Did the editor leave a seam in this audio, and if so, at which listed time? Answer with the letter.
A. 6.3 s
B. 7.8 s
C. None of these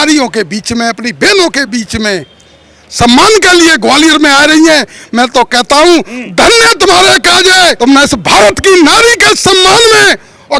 B